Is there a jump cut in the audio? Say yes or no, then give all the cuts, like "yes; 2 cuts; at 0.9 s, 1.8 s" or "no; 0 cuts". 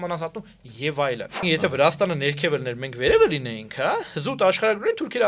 yes; 1 cut; at 1.4 s